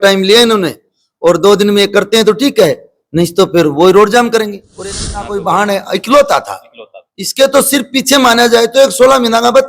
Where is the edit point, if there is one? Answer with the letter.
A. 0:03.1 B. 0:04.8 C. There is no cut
B